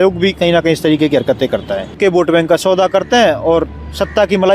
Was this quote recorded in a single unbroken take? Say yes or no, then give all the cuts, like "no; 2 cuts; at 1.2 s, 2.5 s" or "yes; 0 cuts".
no; 1 cut; at 1.9 s